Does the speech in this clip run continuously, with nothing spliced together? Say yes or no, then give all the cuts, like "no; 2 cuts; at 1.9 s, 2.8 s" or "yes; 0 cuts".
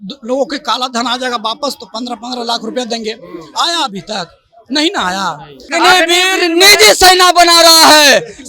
no; 1 cut; at 5.7 s